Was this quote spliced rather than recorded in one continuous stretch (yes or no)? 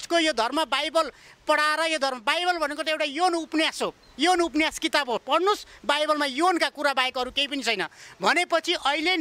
no